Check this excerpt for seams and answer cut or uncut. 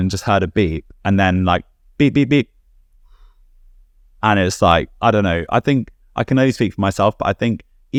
uncut